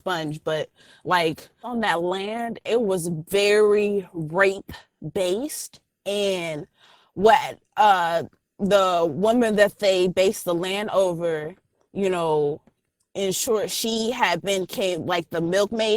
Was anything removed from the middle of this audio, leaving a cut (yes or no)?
yes